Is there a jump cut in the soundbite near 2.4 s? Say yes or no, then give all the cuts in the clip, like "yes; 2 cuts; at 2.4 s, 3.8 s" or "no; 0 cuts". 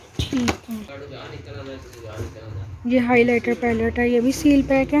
no; 1 cut; at 0.9 s